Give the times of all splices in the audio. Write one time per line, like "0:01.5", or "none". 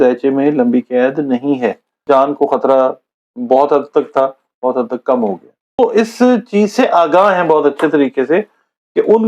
0:01.9
0:05.8